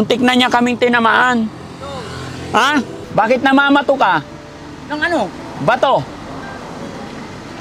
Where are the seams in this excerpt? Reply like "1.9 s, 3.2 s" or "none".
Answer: 3.0 s